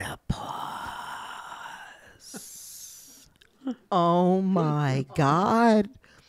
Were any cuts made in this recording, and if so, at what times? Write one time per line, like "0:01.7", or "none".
0:03.9